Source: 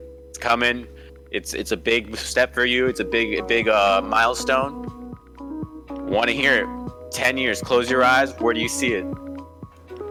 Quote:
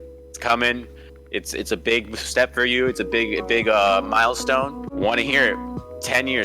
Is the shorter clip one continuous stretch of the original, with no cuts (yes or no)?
no